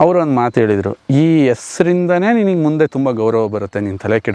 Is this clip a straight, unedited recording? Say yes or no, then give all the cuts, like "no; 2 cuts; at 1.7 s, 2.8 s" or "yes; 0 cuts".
yes; 0 cuts